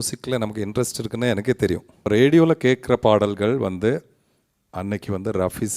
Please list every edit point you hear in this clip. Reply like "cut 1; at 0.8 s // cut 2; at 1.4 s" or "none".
cut 1; at 2.1 s